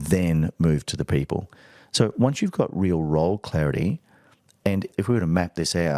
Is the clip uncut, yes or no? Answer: yes